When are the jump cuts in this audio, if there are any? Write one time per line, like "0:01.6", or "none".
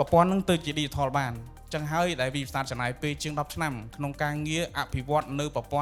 none